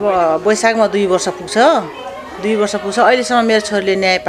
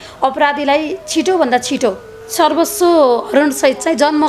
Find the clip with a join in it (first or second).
second